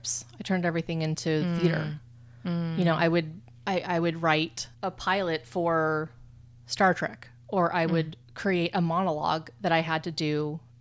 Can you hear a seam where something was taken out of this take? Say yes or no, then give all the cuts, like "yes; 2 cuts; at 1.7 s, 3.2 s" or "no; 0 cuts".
no; 0 cuts